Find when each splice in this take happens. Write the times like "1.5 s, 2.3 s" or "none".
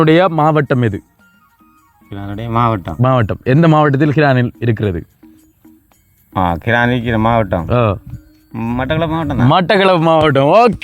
none